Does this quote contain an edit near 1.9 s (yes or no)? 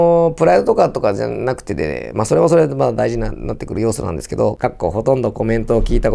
no